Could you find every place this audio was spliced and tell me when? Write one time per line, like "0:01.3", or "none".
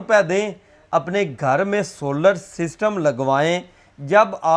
none